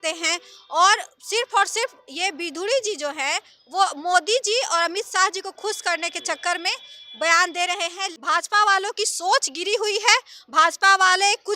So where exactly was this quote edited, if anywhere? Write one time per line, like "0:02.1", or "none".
0:08.1